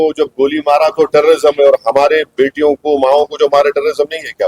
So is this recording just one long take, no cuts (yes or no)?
yes